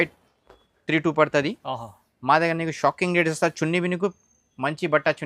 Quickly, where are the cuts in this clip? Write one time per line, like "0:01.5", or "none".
none